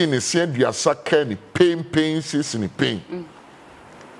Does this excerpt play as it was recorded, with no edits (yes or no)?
yes